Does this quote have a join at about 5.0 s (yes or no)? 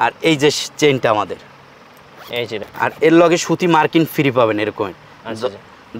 no